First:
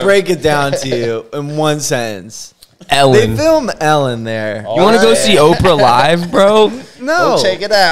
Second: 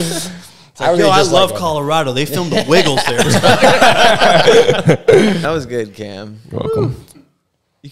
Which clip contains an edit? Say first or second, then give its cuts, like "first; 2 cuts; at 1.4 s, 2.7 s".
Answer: second; 1 cut; at 5.4 s